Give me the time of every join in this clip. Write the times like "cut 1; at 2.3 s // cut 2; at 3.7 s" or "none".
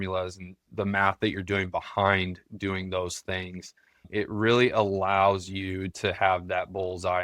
cut 1; at 4.1 s